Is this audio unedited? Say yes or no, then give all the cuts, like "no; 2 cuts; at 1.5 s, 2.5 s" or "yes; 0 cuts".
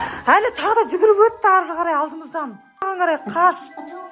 no; 1 cut; at 2.8 s